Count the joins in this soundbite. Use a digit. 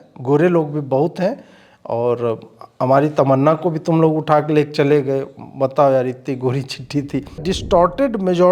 1